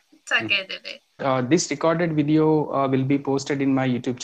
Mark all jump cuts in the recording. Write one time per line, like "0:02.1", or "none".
0:01.2

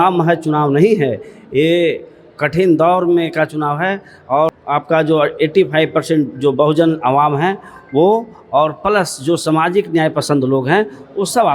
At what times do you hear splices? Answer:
0:04.6

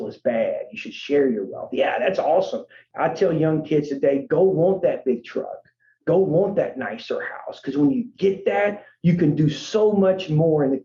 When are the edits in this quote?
0:02.8

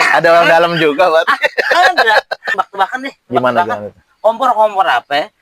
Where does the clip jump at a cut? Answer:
0:02.6

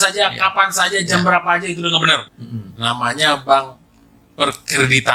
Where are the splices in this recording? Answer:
0:02.3

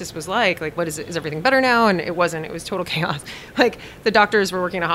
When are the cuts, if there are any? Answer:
none

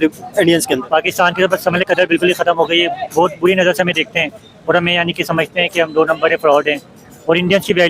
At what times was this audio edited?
none

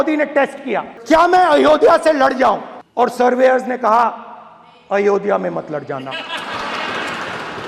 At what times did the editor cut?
0:00.9
0:02.8

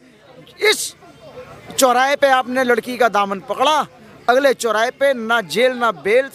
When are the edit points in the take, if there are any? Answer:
none

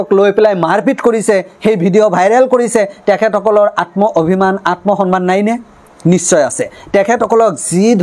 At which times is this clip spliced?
none

